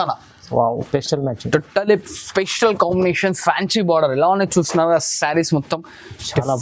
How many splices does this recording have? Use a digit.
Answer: 0